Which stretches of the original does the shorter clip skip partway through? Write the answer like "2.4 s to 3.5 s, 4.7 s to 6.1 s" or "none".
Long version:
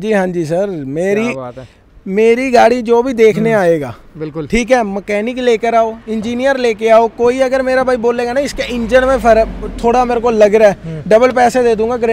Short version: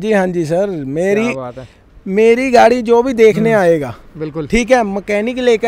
none